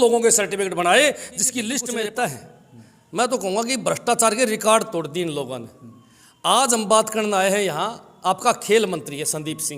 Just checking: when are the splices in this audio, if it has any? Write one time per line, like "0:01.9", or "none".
0:01.8